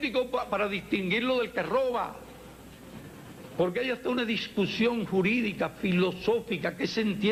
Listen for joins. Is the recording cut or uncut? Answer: uncut